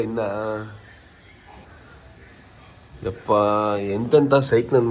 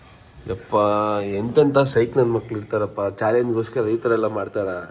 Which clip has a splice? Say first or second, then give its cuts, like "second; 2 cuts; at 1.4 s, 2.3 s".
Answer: first; 1 cut; at 1.6 s